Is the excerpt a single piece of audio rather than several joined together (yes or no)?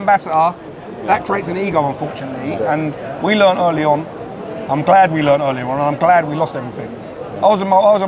yes